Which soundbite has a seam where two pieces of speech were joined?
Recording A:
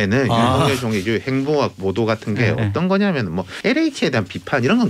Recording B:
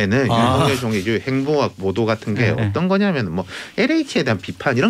A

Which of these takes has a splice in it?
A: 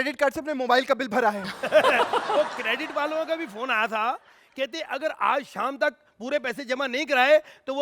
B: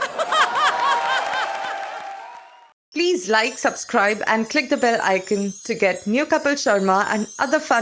B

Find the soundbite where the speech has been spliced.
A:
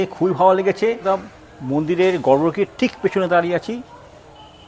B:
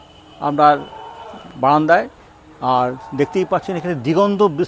A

